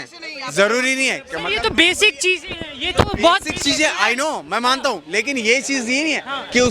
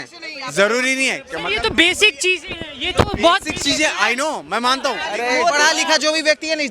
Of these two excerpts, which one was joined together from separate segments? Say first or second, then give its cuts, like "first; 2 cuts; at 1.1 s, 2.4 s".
second; 1 cut; at 5.0 s